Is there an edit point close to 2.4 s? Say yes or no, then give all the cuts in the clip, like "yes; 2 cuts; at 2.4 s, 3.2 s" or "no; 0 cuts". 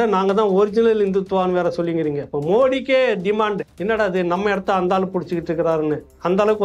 no; 1 cut; at 3.7 s